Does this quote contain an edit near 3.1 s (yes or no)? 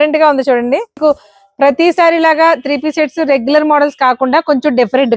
no